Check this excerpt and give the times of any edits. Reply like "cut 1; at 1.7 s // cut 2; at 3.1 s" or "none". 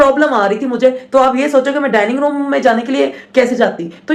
none